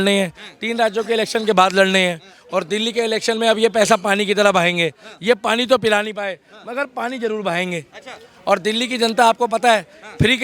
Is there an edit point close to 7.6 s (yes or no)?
no